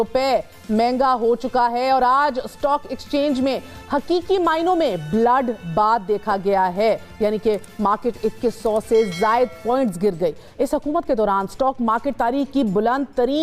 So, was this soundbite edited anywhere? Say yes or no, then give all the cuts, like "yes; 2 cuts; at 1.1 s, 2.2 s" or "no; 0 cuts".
no; 0 cuts